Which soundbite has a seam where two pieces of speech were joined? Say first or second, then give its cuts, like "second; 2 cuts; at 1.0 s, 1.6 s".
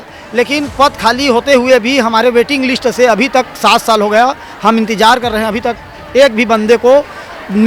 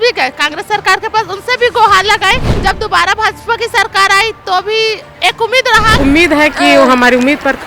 second; 2 cuts; at 2.5 s, 6.0 s